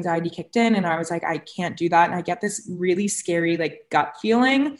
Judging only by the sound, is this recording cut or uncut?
uncut